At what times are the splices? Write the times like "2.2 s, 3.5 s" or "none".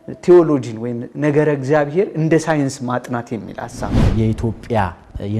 4.0 s